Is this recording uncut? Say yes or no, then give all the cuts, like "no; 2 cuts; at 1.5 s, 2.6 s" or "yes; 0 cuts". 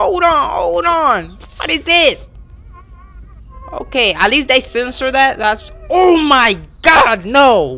yes; 0 cuts